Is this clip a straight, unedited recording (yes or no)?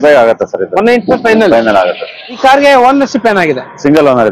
no